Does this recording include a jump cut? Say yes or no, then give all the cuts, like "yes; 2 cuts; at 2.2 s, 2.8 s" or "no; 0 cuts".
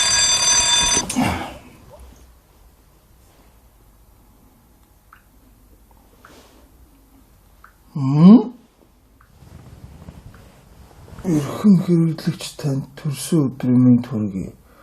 yes; 1 cut; at 0.9 s